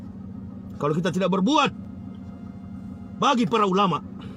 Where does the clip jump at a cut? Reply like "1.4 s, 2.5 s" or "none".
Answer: none